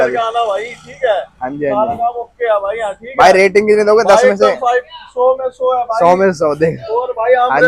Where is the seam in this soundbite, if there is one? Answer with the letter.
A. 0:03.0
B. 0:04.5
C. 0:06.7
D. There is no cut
D